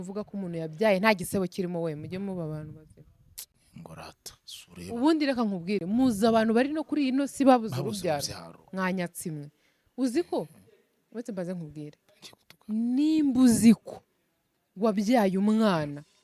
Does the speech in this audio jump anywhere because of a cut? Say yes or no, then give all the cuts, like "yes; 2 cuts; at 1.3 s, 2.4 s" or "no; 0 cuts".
no; 0 cuts